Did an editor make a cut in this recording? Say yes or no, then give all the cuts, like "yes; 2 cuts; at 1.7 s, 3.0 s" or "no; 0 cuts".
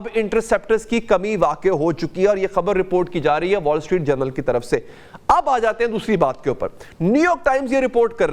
no; 0 cuts